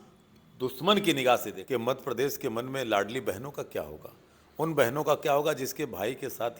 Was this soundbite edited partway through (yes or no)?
yes